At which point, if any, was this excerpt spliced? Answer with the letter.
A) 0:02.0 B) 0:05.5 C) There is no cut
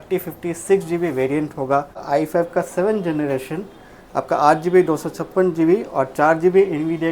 A